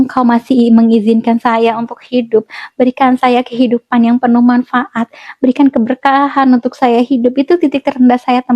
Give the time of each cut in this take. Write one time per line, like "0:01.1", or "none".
none